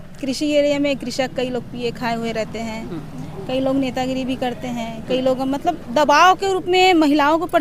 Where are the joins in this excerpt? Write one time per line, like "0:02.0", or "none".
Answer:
none